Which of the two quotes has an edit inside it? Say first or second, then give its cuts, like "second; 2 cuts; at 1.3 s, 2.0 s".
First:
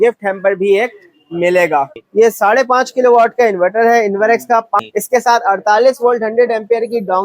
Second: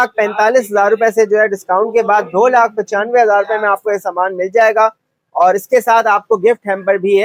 first; 2 cuts; at 2.0 s, 4.8 s